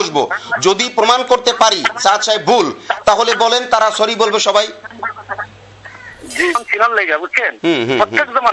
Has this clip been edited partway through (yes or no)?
yes